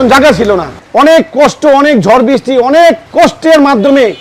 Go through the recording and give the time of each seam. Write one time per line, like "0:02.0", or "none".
0:03.0